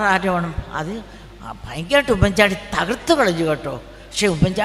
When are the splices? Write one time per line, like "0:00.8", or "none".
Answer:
none